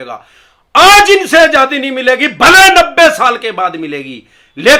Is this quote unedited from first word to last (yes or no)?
yes